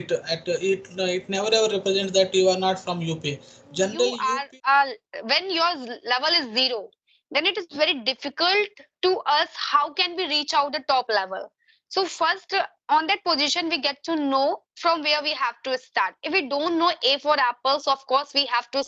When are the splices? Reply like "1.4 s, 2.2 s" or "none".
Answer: 4.2 s